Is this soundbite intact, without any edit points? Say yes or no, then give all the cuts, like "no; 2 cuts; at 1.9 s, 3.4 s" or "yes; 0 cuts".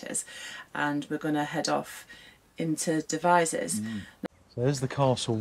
no; 1 cut; at 4.1 s